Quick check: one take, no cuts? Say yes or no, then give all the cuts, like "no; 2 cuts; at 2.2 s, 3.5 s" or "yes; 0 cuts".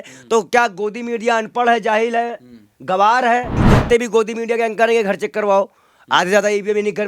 no; 1 cut; at 3.6 s